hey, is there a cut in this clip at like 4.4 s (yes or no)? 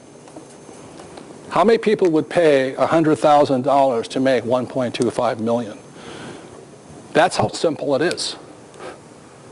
no